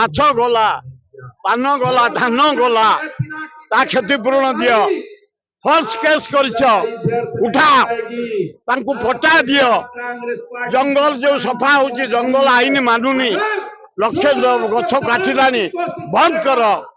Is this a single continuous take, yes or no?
yes